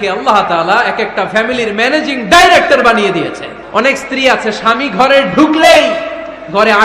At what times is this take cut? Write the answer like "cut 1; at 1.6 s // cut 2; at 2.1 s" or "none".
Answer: cut 1; at 3.5 s